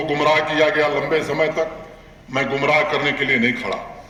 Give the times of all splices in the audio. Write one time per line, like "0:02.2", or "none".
none